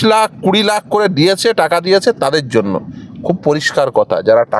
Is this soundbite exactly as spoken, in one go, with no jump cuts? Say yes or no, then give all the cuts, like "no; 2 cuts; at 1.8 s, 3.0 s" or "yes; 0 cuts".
yes; 0 cuts